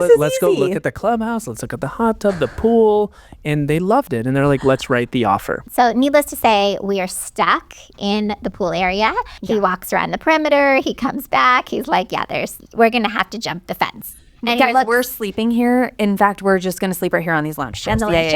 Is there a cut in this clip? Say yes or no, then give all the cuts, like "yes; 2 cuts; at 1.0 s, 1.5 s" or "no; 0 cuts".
yes; 2 cuts; at 5.6 s, 9.3 s